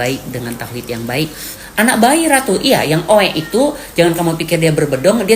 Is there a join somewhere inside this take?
yes; 1 cut; at 1.6 s

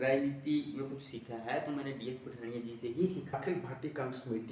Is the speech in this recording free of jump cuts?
no; 1 cut; at 3.4 s

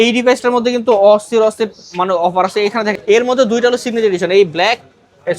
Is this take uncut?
no; 1 cut; at 3.0 s

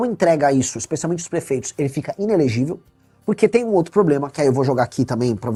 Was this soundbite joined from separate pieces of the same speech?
no; 0 cuts

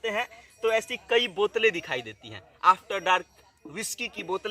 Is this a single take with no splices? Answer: yes; 0 cuts

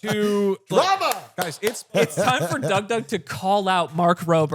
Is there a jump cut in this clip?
yes; 1 cut; at 2.1 s

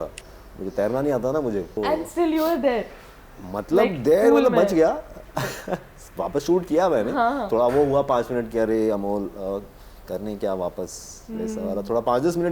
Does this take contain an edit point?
no; 0 cuts

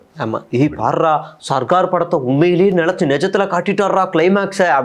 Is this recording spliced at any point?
no; 0 cuts

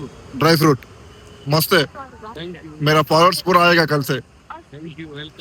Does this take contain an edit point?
no; 0 cuts

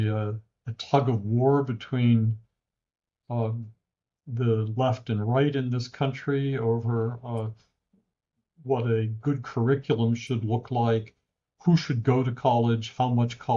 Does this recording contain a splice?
no; 0 cuts

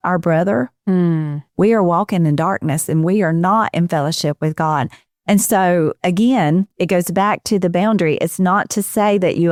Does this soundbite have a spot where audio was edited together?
no; 0 cuts

